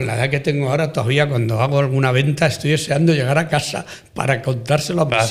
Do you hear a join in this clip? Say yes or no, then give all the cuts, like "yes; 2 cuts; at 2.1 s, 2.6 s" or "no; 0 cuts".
no; 0 cuts